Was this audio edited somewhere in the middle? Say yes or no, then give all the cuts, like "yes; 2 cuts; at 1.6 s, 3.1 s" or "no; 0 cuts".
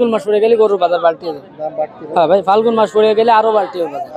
no; 0 cuts